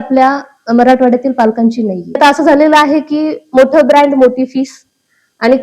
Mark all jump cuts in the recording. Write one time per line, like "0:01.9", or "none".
0:02.2